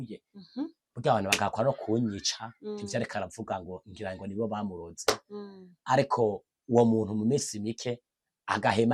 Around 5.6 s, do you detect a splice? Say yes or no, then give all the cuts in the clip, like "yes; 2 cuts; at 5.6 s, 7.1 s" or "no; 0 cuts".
no; 0 cuts